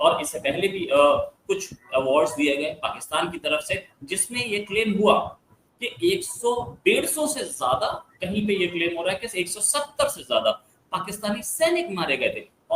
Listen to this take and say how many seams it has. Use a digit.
0